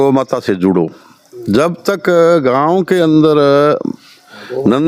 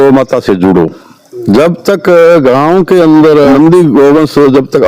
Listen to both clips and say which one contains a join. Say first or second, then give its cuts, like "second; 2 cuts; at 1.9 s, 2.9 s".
second; 1 cut; at 3.5 s